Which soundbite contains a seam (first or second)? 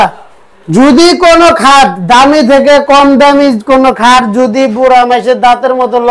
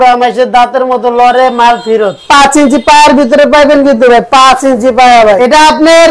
second